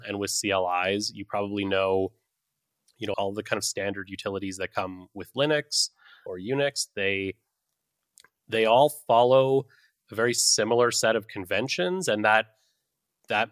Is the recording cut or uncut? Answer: cut